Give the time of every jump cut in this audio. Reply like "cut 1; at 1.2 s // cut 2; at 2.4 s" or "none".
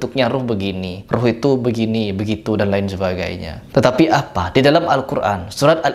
none